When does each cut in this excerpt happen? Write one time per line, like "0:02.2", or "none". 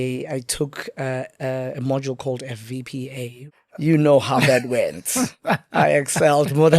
0:03.4